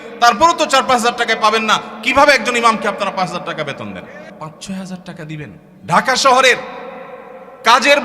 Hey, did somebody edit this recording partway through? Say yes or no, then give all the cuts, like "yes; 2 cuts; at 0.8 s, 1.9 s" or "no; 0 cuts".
yes; 2 cuts; at 4.3 s, 5.7 s